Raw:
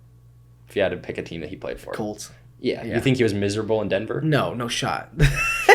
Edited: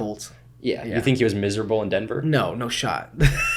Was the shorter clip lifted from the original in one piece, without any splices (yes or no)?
yes